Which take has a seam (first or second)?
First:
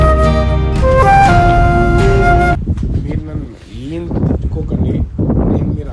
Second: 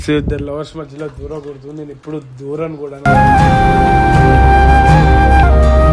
first